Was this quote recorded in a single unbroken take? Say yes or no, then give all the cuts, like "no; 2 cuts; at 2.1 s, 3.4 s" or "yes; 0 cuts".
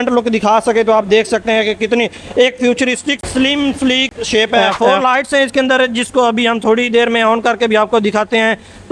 no; 2 cuts; at 3.2 s, 4.6 s